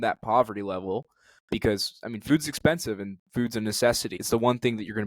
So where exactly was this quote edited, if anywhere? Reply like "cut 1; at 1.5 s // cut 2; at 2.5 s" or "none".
cut 1; at 4.1 s